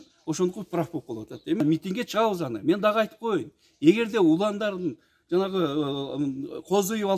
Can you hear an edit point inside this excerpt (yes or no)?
yes